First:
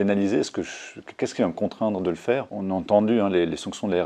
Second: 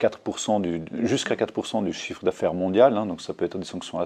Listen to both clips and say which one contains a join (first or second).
first